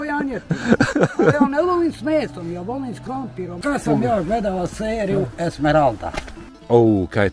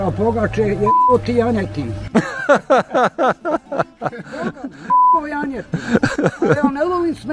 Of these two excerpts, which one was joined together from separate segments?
first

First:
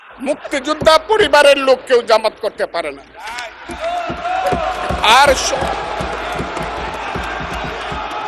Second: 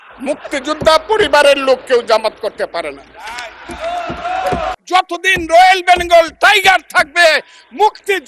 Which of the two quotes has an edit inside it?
second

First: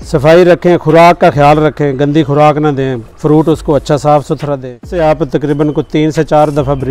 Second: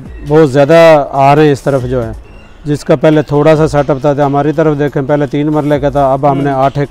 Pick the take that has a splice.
first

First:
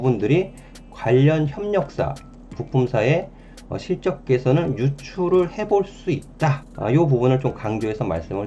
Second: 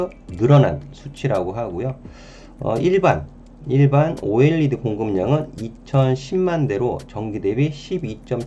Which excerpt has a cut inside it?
first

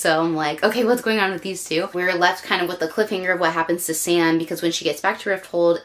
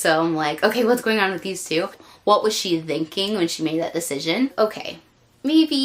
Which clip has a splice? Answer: second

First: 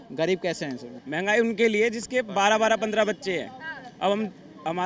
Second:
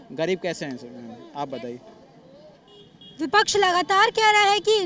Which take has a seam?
first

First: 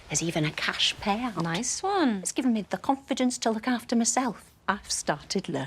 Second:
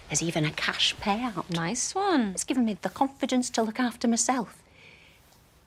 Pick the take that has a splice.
first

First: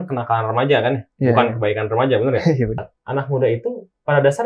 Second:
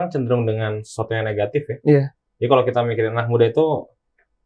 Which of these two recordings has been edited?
first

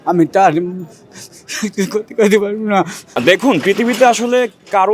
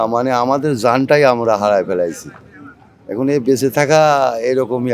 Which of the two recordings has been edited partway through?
first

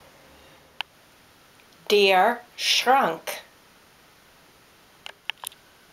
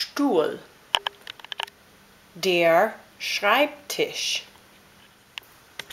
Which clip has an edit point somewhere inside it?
first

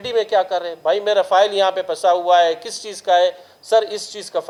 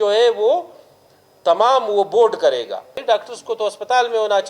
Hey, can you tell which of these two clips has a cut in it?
second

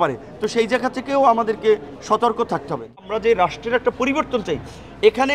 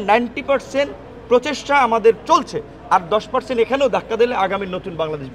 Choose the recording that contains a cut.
first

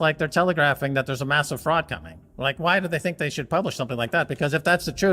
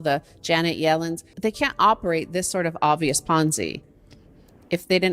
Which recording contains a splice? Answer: second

